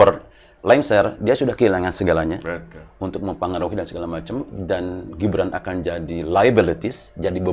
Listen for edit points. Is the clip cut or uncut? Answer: uncut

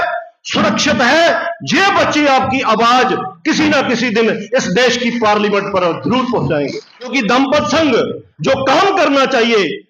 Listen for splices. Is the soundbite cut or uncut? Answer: cut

